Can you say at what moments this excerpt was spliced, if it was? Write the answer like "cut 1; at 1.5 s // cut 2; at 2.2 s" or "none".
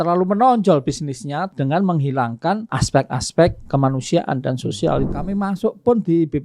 cut 1; at 1.5 s // cut 2; at 2.7 s // cut 3; at 5.1 s